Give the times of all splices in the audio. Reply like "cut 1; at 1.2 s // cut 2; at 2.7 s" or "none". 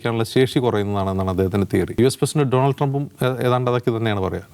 cut 1; at 2.0 s